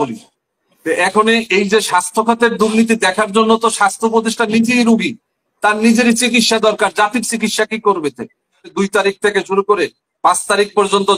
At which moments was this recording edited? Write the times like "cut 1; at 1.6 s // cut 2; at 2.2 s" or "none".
cut 1; at 8.7 s